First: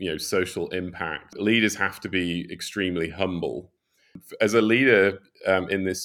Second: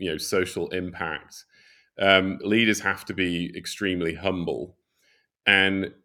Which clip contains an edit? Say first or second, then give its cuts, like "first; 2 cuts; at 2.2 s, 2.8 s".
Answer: first; 2 cuts; at 1.3 s, 4.2 s